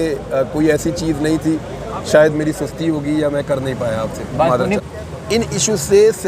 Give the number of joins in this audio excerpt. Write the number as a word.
one